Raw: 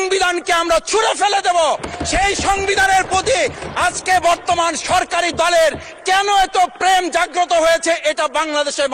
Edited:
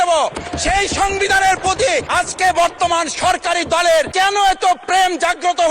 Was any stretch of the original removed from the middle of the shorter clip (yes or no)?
yes